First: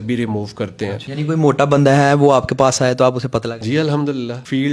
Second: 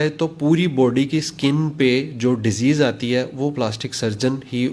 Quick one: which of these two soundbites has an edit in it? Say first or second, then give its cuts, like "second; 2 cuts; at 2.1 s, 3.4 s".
first; 2 cuts; at 1.0 s, 3.6 s